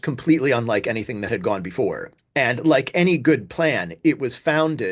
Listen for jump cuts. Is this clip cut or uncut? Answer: cut